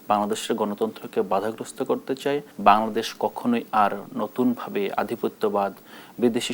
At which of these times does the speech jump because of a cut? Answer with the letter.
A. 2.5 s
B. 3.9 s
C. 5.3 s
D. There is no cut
A